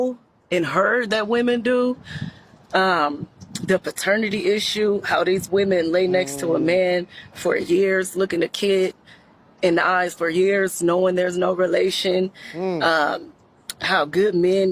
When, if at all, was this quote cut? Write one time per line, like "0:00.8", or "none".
none